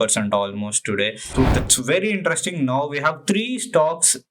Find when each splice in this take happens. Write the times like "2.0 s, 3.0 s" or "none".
1.2 s